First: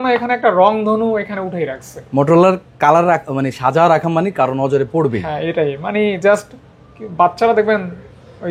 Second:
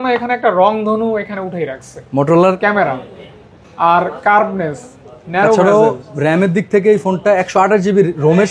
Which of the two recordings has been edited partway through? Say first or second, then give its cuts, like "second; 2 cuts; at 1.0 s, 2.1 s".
second; 1 cut; at 2.6 s